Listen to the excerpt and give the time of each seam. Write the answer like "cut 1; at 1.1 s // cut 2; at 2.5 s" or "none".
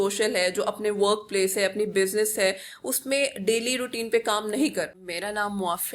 cut 1; at 5.0 s